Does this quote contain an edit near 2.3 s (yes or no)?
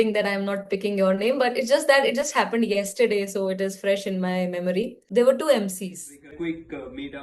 no